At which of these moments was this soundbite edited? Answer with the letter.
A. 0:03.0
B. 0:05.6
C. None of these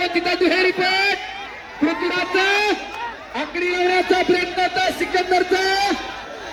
C